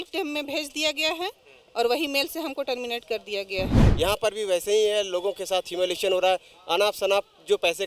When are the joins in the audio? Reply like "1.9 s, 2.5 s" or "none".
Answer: 3.8 s